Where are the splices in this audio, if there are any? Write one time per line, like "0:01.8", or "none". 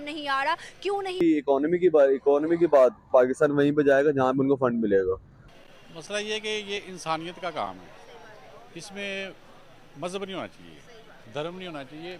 0:01.1
0:05.3